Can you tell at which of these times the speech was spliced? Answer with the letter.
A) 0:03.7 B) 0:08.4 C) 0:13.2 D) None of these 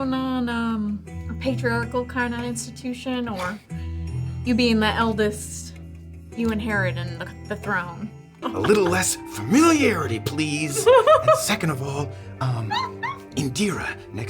B